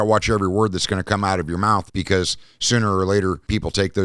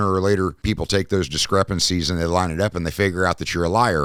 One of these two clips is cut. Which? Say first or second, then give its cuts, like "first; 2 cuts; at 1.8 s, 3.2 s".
first; 1 cut; at 1.9 s